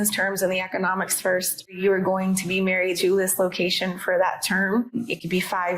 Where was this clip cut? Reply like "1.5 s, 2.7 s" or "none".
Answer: 1.7 s, 2.9 s, 5.0 s